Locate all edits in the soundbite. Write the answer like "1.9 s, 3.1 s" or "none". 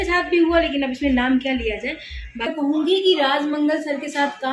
2.5 s